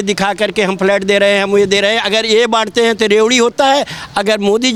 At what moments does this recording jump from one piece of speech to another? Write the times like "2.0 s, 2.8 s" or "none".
none